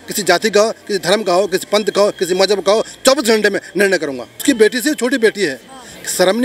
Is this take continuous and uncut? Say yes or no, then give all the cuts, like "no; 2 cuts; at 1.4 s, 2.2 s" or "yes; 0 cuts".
no; 1 cut; at 4.4 s